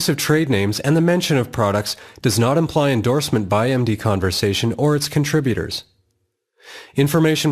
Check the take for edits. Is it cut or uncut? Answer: cut